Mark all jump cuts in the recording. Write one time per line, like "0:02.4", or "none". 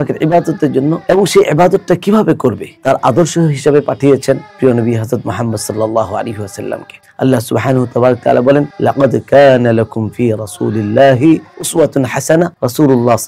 0:01.0
0:02.7
0:11.6